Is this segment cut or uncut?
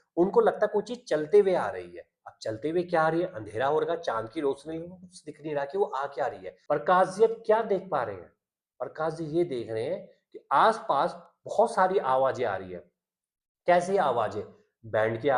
cut